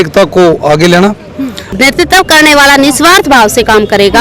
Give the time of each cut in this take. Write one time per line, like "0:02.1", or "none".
0:01.8